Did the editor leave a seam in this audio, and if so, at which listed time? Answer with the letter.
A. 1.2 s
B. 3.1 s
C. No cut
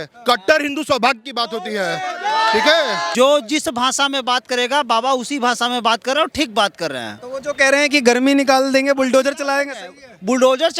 B